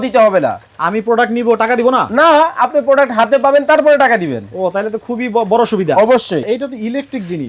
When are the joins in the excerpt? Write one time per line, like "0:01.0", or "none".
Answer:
0:06.4